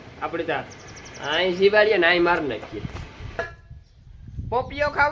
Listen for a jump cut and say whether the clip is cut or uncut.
cut